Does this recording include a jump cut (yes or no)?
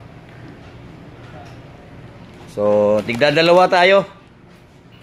no